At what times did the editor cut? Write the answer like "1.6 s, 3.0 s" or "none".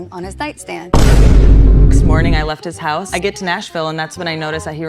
2.4 s